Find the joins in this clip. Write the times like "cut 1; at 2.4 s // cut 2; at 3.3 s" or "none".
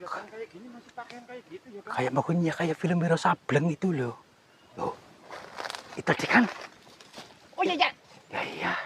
cut 1; at 4.8 s